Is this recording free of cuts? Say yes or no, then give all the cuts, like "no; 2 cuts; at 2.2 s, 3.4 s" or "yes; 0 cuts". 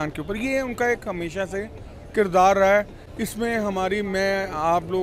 yes; 0 cuts